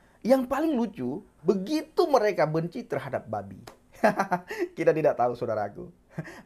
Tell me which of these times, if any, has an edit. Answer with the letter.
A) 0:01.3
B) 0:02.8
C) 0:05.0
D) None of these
A